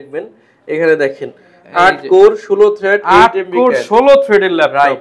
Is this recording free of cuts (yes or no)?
yes